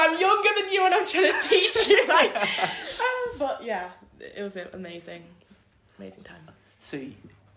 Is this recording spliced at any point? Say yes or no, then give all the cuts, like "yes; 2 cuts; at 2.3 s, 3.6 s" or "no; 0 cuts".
no; 0 cuts